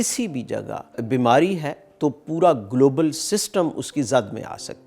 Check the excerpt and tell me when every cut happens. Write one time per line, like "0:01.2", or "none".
0:01.0